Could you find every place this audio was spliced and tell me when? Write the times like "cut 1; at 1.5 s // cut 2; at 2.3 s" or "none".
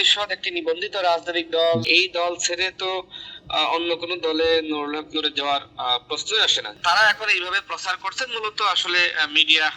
cut 1; at 1.8 s // cut 2; at 6.7 s